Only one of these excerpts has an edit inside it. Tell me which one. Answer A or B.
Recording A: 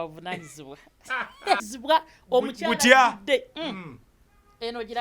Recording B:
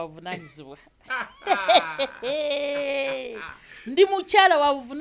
A